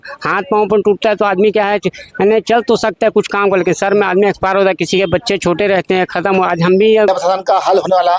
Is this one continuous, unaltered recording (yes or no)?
no